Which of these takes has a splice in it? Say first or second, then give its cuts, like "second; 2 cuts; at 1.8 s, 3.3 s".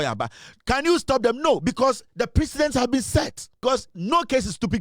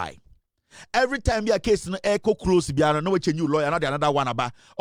first; 1 cut; at 3.6 s